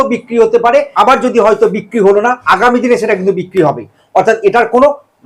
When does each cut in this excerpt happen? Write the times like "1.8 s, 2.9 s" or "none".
0.9 s, 2.4 s